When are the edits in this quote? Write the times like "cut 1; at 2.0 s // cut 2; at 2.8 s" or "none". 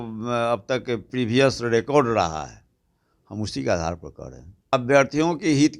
cut 1; at 4.7 s